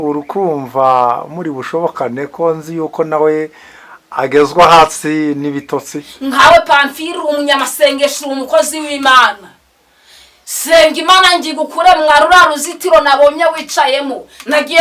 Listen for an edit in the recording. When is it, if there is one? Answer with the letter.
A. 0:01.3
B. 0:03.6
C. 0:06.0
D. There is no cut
C